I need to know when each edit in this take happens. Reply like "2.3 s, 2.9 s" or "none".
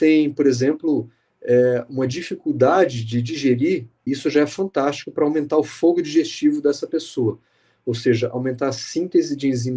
4.0 s